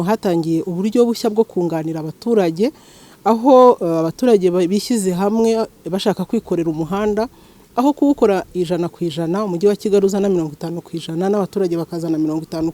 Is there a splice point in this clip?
no; 0 cuts

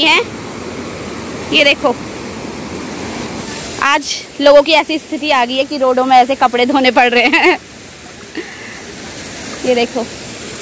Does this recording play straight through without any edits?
no; 1 cut; at 3.4 s

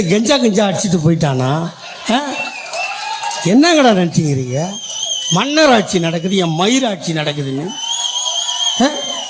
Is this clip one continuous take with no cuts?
yes; 0 cuts

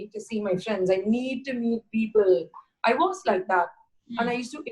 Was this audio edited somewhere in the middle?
no; 0 cuts

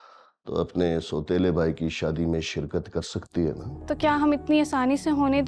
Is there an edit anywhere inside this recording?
yes; 1 cut; at 3.7 s

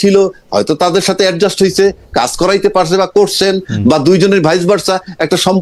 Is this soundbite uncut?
yes; 0 cuts

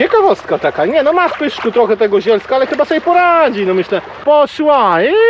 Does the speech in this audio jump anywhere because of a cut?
yes; 1 cut; at 4.2 s

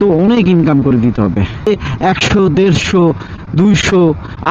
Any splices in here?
yes; 1 cut; at 1.7 s

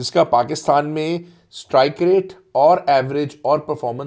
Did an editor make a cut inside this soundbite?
no; 0 cuts

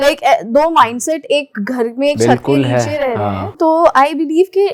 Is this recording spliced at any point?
no; 0 cuts

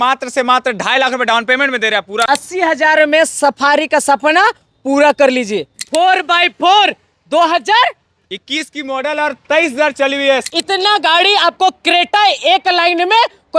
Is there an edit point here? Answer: yes; 3 cuts; at 2.2 s, 5.7 s, 10.4 s

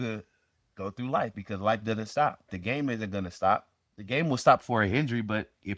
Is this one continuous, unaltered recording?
yes; 0 cuts

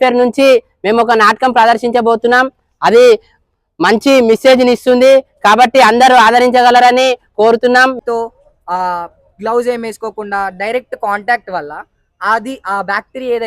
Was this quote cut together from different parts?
yes; 1 cut; at 8.0 s

